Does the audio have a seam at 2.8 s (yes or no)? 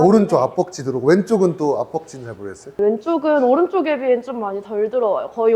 yes